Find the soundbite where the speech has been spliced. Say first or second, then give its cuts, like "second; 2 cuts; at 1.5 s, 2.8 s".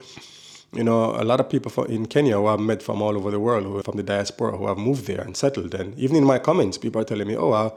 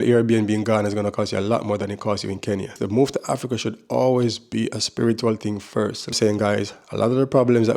second; 2 cuts; at 2.8 s, 6.2 s